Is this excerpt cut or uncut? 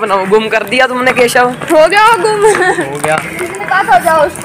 uncut